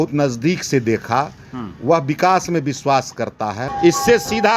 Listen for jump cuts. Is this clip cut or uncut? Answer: cut